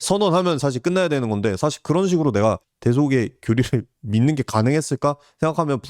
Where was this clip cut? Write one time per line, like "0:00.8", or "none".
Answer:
0:02.7